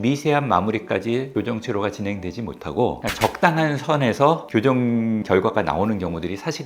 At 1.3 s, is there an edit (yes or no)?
yes